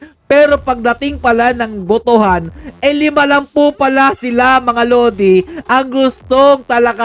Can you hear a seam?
no; 0 cuts

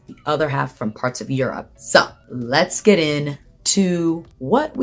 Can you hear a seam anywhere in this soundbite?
yes; 1 cut; at 1.7 s

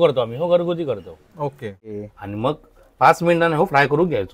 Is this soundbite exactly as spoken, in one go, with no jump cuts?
no; 1 cut; at 1.9 s

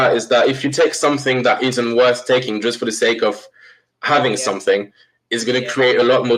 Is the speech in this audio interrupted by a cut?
no; 0 cuts

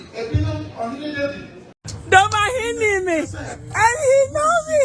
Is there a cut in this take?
yes; 1 cut; at 1.6 s

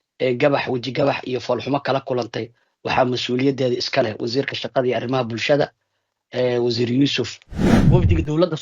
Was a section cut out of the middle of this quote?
yes; 1 cut; at 7.7 s

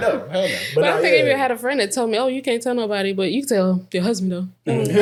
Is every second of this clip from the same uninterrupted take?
yes; 0 cuts

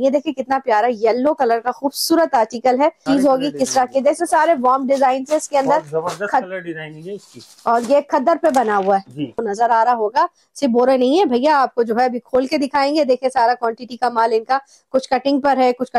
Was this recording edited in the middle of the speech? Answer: yes; 2 cuts; at 3.0 s, 9.4 s

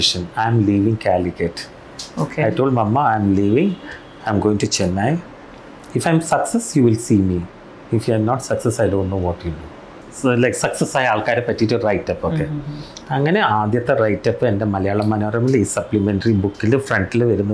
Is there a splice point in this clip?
yes; 1 cut; at 10.0 s

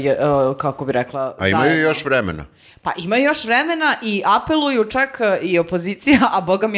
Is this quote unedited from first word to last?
yes; 0 cuts

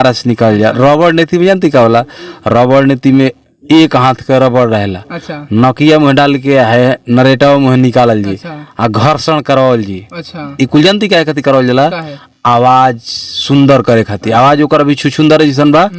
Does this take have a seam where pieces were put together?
no; 0 cuts

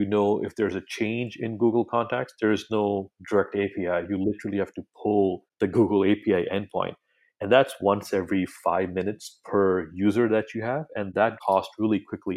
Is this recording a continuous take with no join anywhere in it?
no; 2 cuts; at 5.5 s, 11.4 s

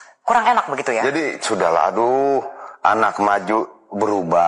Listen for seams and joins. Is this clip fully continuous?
no; 1 cut; at 1.0 s

